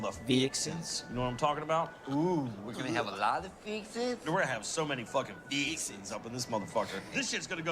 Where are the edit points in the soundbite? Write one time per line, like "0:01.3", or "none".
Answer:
0:03.0